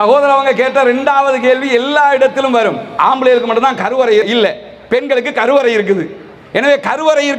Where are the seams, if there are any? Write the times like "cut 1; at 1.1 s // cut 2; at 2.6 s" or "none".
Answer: cut 1; at 2.9 s